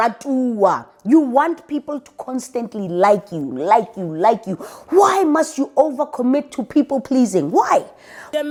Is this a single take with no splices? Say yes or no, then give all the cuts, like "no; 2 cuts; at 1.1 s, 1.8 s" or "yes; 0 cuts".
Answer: yes; 0 cuts